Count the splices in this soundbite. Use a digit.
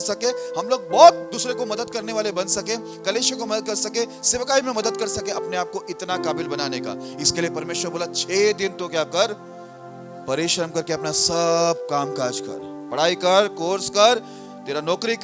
0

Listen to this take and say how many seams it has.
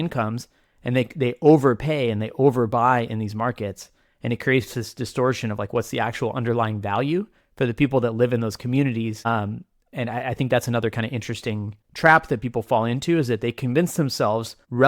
0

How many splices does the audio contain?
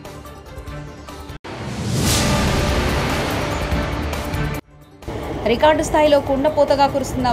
2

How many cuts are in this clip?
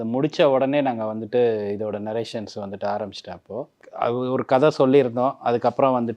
1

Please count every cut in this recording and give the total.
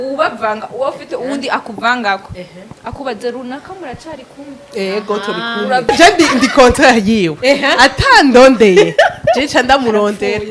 1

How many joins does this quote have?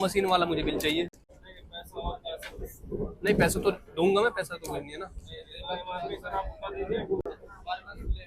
0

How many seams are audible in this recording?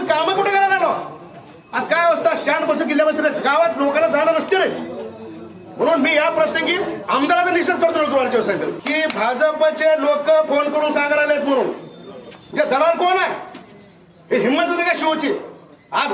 1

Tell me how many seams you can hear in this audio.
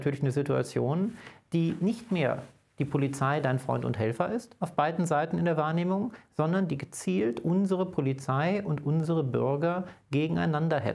0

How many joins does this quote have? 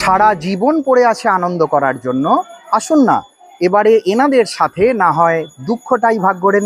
0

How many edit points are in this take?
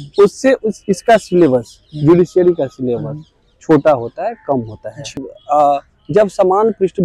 1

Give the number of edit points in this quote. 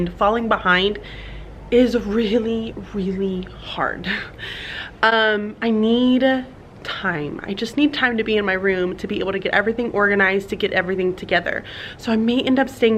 0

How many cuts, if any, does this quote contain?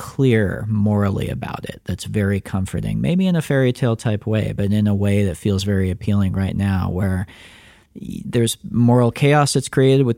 0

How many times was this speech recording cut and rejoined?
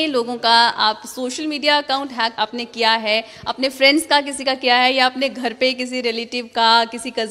1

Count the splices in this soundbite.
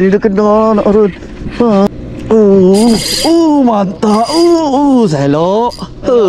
1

